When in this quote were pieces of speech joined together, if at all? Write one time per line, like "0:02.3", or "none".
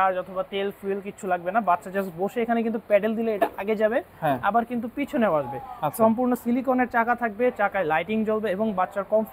none